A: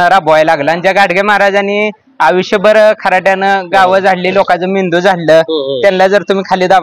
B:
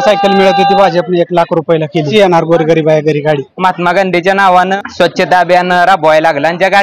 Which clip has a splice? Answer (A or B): B